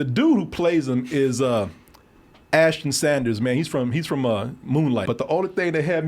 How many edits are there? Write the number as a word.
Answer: one